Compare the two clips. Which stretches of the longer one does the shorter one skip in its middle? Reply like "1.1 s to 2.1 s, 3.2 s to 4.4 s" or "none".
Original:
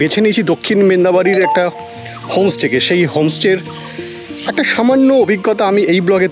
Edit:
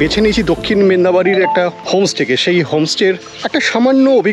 1.8 s to 2.2 s, 3.8 s to 4.4 s

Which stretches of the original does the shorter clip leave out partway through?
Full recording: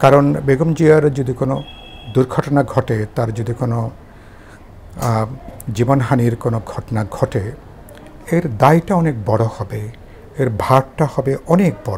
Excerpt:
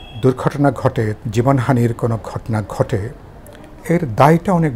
3.1 s to 5.6 s

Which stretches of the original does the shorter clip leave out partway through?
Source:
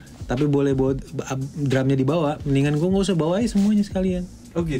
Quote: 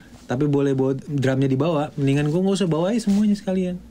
1.1 s to 1.5 s

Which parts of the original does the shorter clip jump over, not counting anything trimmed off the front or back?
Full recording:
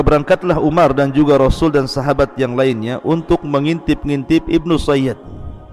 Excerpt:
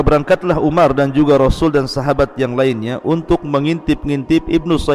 none

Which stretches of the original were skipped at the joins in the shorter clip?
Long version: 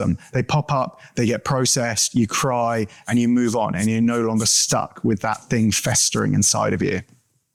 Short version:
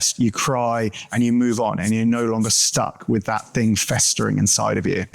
none

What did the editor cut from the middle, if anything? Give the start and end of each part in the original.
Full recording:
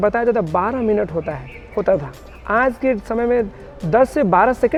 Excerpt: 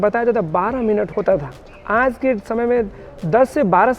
1.1 s to 1.7 s

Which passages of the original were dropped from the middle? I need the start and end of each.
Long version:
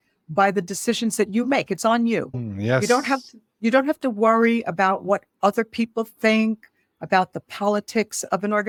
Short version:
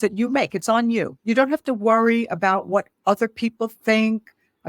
2.3 s to 3.5 s

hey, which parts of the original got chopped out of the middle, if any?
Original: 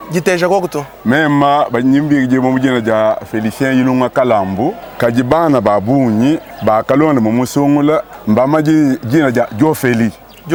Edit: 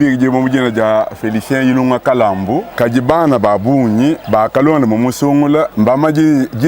4.8 s to 4.9 s, 6.4 s to 6.6 s, 8.0 s to 8.2 s

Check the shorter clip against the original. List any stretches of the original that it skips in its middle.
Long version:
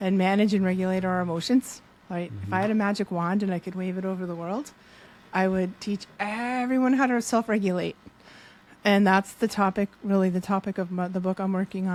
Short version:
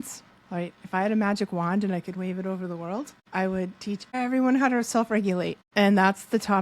4.8 s to 5.2 s, 6.1 s to 6.5 s, 8.0 s to 8.7 s

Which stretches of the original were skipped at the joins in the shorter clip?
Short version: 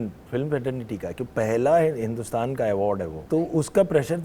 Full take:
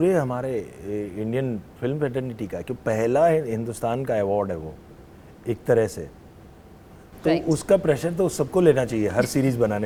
4.7 s to 7.1 s

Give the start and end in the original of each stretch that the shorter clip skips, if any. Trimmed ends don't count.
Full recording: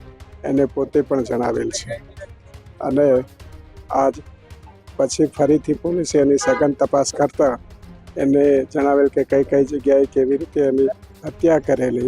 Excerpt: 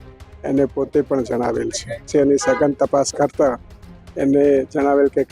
2.1 s to 6.1 s

